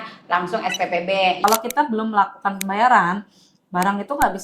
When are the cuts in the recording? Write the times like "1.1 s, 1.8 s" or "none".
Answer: 1.4 s